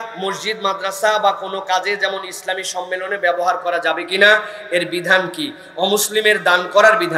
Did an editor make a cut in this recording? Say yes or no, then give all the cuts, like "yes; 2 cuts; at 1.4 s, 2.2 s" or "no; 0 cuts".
no; 0 cuts